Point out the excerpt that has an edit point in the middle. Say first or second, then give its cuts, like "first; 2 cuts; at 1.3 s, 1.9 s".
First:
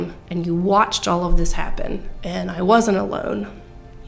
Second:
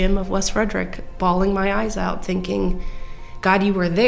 first; 1 cut; at 2.1 s